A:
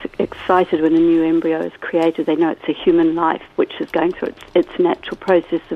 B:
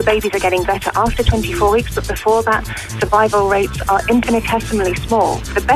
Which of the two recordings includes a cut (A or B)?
B